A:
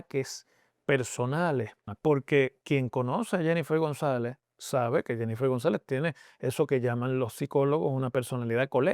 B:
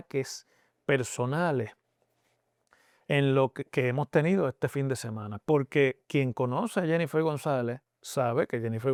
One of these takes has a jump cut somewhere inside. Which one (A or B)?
A